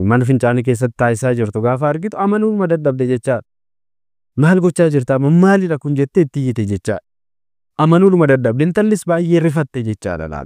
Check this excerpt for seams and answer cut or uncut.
uncut